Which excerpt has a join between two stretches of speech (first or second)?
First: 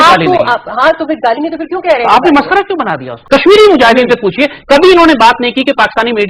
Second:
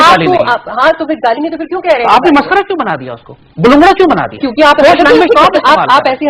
first